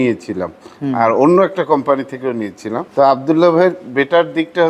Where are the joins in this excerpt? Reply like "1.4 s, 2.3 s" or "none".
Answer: 2.9 s